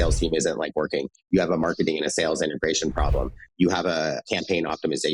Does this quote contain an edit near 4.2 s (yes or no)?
yes